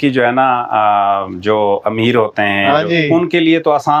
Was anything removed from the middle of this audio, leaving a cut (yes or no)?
no